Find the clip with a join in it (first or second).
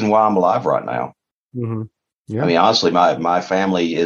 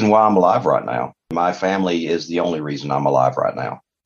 second